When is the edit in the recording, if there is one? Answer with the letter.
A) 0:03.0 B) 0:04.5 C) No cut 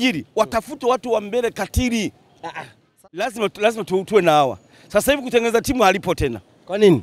A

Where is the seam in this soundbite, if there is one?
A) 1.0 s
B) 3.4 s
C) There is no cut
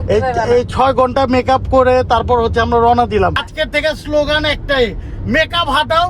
B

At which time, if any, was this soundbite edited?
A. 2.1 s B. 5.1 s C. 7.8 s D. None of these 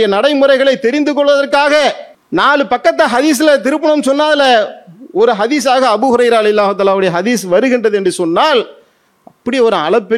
A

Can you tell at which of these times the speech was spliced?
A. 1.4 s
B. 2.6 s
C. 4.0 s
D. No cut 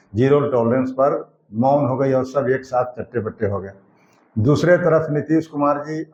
D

